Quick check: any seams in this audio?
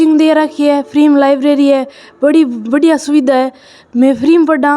no; 0 cuts

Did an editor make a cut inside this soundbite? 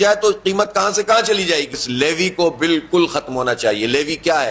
yes; 1 cut; at 1.8 s

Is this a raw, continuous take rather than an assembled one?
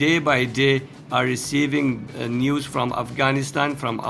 no; 1 cut; at 2.1 s

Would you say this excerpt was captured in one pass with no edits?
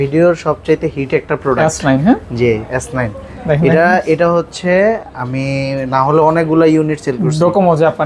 yes; 0 cuts

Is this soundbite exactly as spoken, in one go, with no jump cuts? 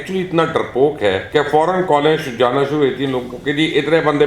no; 1 cut; at 1.2 s

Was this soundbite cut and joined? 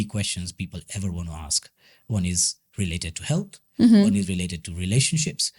no; 0 cuts

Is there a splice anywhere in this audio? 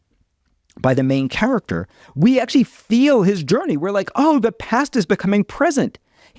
no; 0 cuts

